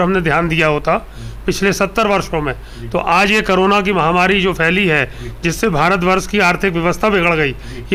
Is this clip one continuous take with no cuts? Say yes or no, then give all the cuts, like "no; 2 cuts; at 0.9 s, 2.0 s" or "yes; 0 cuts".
yes; 0 cuts